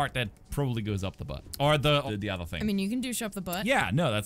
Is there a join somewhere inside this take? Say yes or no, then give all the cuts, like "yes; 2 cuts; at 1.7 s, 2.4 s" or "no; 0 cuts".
yes; 2 cuts; at 1.4 s, 2.1 s